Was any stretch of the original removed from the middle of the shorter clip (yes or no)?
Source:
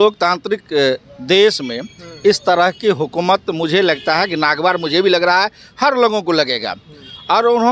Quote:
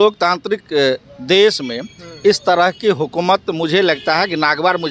no